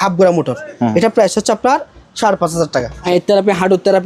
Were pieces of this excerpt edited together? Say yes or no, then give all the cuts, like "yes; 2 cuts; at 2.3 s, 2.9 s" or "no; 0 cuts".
yes; 1 cut; at 3.0 s